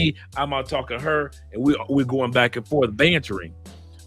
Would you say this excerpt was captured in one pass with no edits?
yes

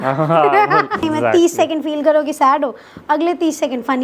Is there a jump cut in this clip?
yes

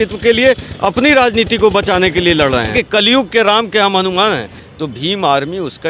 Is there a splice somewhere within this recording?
yes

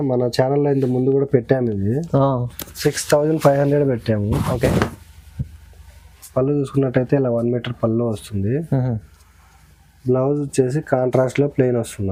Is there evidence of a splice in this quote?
no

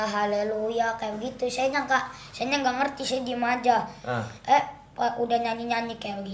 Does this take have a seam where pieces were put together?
no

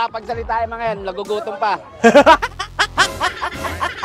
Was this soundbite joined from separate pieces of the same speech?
no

